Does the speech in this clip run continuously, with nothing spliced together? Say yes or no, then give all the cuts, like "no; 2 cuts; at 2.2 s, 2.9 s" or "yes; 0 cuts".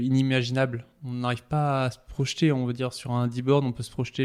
yes; 0 cuts